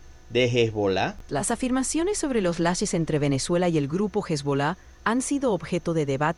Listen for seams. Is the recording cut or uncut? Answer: uncut